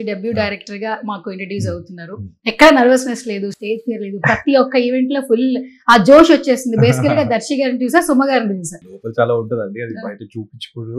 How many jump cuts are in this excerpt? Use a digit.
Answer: 1